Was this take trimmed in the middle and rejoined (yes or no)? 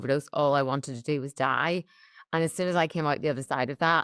no